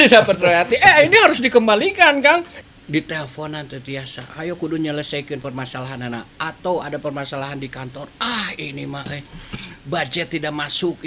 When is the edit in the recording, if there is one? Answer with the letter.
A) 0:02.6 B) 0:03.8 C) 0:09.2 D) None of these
A